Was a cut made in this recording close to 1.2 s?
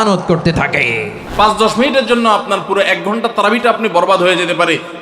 yes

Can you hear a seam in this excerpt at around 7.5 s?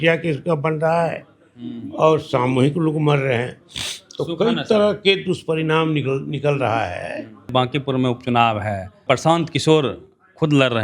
yes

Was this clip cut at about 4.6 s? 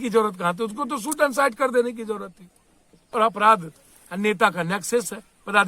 no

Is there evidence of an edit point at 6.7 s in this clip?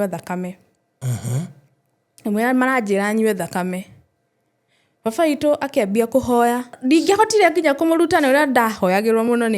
yes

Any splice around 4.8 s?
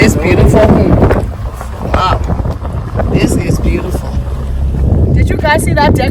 yes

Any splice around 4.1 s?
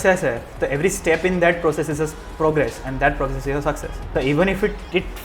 yes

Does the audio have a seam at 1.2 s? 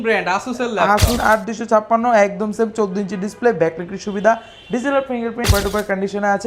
yes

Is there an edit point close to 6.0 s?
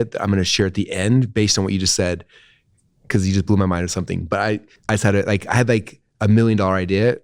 no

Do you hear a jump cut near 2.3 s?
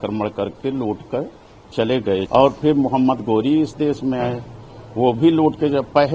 yes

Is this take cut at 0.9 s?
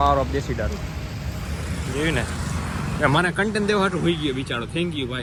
no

